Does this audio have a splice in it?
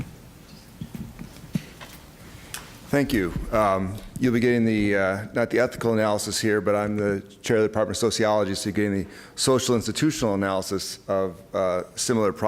no; 0 cuts

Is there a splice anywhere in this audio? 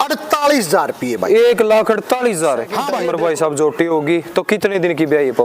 yes; 1 cut; at 2.8 s

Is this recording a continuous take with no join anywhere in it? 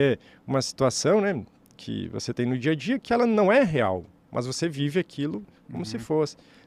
yes; 0 cuts

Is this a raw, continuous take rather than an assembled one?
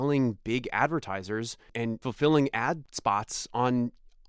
no; 2 cuts; at 2.0 s, 2.9 s

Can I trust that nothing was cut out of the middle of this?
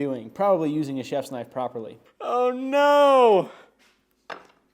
no; 1 cut; at 2.0 s

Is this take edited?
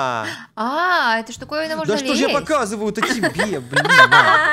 no; 0 cuts

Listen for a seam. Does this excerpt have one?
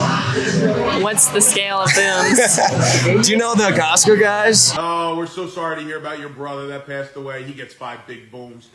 no; 0 cuts

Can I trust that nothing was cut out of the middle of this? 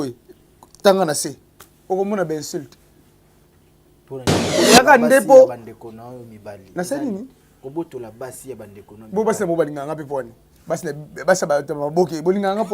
no; 1 cut; at 4.4 s

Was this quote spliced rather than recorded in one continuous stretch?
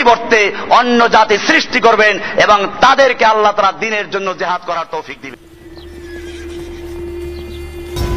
yes; 1 cut; at 5.5 s

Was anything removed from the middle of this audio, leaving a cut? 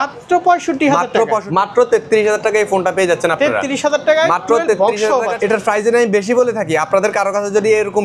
yes; 2 cuts; at 1.5 s, 5.3 s

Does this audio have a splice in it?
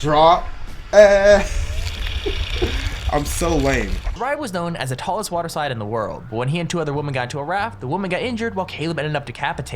yes; 1 cut; at 4.0 s

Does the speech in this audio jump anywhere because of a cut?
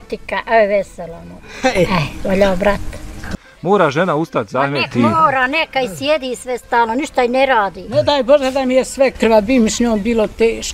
yes; 1 cut; at 3.3 s

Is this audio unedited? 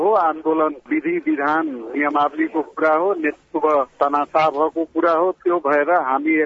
yes; 0 cuts

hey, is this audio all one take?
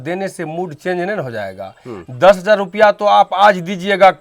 yes; 0 cuts

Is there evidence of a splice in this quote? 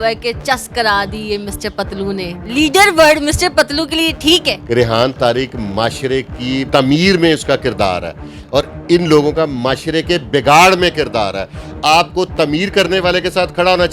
yes; 2 cuts; at 4.6 s, 6.7 s

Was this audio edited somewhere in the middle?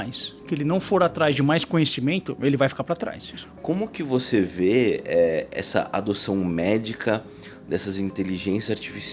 yes; 1 cut; at 3.3 s

